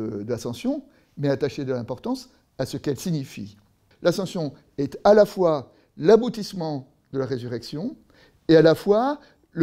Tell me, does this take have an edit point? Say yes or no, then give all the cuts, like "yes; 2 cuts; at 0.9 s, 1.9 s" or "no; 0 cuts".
yes; 1 cut; at 3.9 s